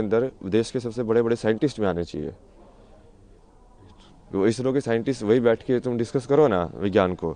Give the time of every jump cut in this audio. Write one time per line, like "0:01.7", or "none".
none